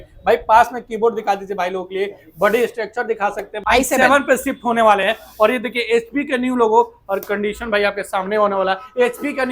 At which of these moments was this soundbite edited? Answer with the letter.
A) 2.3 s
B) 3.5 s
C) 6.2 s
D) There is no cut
B